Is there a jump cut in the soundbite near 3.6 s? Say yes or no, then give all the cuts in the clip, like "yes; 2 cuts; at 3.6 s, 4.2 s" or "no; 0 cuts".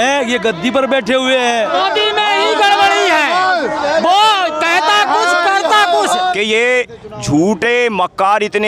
no; 2 cuts; at 1.7 s, 6.3 s